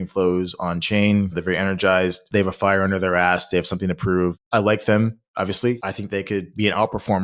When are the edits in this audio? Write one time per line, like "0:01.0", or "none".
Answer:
0:01.4
0:02.2
0:04.4
0:06.2